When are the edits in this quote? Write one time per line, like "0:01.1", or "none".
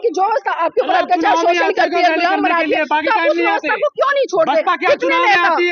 none

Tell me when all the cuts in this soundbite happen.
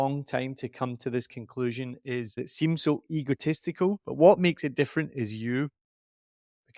0:02.4

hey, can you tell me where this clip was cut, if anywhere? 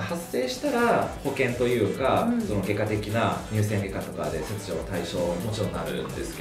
none

